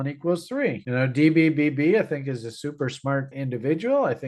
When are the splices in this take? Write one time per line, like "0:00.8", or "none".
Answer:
0:03.3

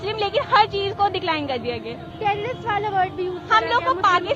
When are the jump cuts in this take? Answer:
none

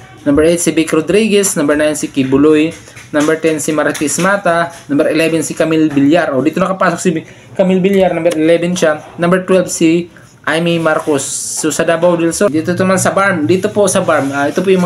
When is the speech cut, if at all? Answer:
0:12.5

